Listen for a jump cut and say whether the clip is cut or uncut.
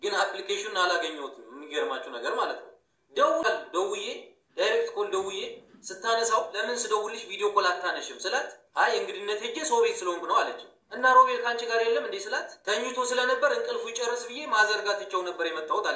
cut